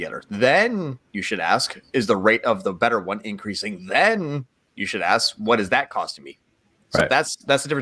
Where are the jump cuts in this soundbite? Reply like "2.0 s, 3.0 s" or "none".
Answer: none